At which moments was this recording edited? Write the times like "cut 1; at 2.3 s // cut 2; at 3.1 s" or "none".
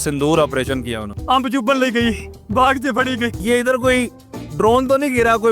cut 1; at 1.0 s // cut 2; at 2.3 s // cut 3; at 3.4 s

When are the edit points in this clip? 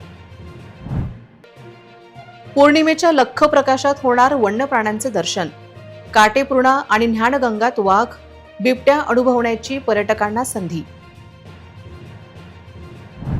cut 1; at 1.0 s

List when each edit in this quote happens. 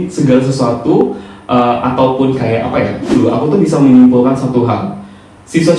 cut 1; at 3.2 s

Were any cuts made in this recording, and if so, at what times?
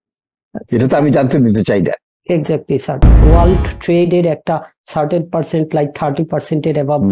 cut 1; at 3.1 s

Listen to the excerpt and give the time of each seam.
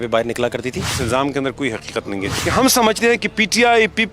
cut 1; at 0.9 s // cut 2; at 2.3 s

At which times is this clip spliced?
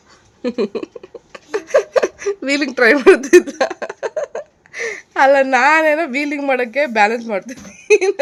none

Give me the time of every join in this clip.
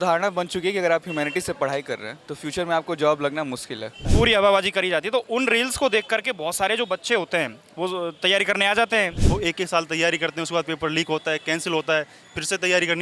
cut 1; at 4.0 s // cut 2; at 9.2 s

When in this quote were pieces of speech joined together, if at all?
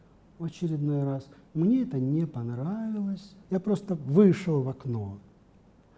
cut 1; at 3.3 s

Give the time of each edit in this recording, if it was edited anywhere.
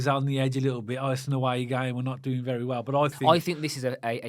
cut 1; at 3.2 s

